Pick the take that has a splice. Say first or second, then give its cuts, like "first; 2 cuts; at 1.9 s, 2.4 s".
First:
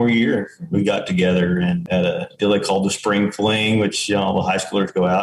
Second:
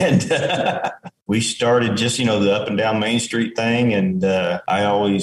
second; 1 cut; at 1.1 s